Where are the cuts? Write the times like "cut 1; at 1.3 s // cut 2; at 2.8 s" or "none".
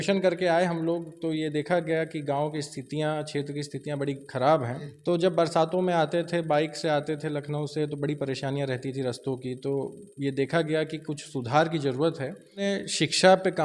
cut 1; at 4.8 s // cut 2; at 12.7 s